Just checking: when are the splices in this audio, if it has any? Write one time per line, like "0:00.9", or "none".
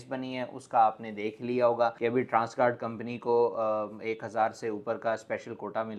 none